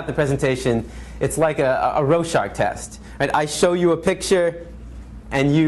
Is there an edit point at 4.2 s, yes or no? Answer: no